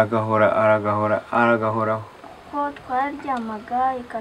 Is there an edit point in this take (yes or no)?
yes